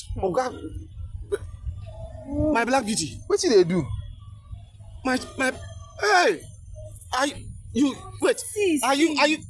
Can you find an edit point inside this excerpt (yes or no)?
no